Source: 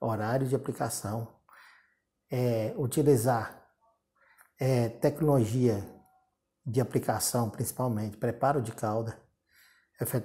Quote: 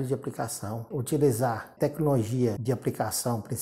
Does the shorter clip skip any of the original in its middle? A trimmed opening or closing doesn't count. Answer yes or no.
yes